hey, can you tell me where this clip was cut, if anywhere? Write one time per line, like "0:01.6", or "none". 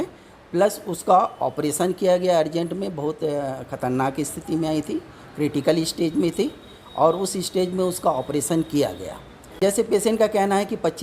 0:09.6